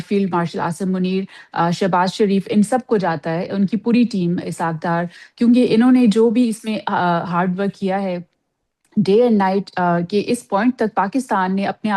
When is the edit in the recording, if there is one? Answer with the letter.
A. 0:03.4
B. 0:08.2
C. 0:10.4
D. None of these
D